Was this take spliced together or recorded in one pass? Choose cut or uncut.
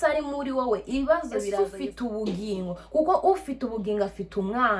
cut